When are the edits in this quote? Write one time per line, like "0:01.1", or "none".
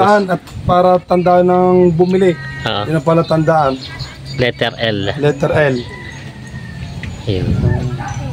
none